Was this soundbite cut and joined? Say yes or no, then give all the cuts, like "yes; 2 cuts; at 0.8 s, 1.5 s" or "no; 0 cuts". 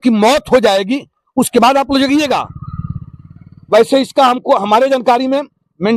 no; 0 cuts